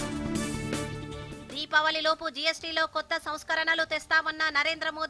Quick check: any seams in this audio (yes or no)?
yes